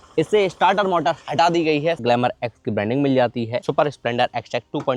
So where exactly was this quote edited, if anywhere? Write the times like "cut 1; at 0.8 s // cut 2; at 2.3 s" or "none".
cut 1; at 2.0 s // cut 2; at 3.6 s